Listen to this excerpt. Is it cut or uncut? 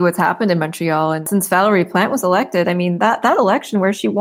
cut